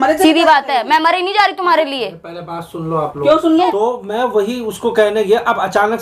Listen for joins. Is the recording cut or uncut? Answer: cut